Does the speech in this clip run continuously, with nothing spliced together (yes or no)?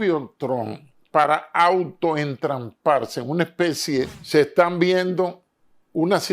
no